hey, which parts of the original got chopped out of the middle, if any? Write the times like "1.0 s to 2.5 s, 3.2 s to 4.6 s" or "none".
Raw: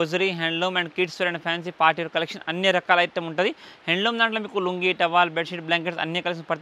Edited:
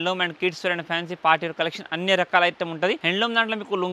3.6 s to 3.9 s